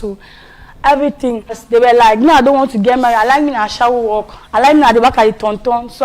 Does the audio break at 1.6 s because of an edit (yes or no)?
yes